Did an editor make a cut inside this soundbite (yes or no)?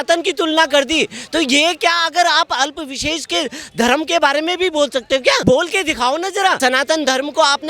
yes